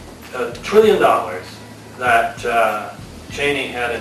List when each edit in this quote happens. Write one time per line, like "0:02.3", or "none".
none